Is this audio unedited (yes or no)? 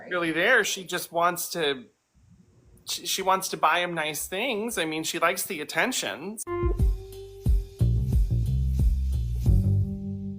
no